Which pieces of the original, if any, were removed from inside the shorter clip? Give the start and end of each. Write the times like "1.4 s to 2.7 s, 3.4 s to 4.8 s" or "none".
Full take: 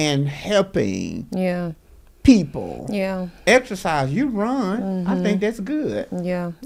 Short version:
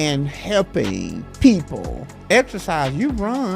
1.2 s to 2.0 s, 2.9 s to 3.2 s